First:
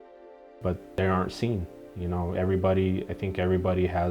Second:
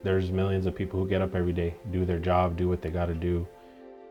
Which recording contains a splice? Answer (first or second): first